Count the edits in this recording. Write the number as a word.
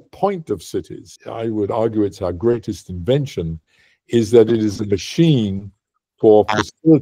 one